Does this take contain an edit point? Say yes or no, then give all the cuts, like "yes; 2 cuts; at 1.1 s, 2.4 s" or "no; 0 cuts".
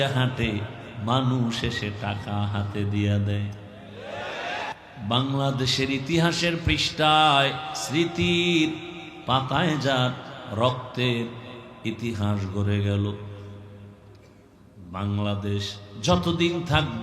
yes; 1 cut; at 4.7 s